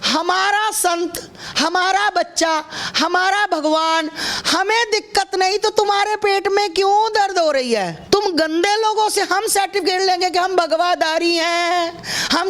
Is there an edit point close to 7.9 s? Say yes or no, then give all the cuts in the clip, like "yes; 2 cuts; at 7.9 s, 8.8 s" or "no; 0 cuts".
yes; 1 cut; at 7.9 s